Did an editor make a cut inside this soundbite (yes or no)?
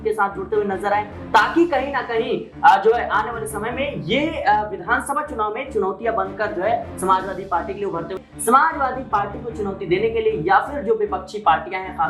yes